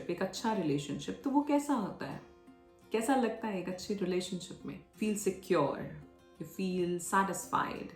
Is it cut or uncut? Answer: cut